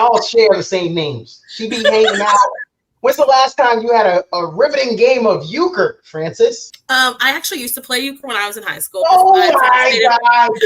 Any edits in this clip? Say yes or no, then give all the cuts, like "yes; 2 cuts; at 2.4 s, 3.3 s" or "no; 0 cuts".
yes; 1 cut; at 6.7 s